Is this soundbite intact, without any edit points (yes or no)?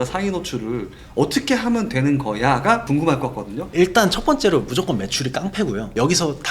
no